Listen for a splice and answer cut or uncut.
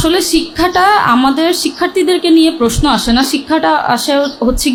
uncut